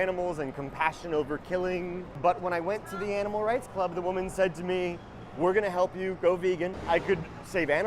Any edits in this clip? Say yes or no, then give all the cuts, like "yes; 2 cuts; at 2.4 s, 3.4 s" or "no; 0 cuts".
yes; 2 cuts; at 2.1 s, 6.8 s